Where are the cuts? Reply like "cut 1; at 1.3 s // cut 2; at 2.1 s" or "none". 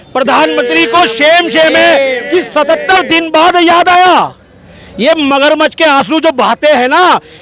none